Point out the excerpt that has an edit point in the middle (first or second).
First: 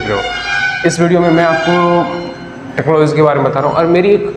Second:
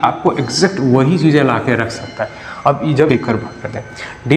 second